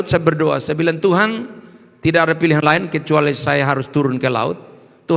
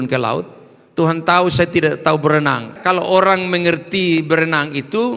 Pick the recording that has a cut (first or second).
second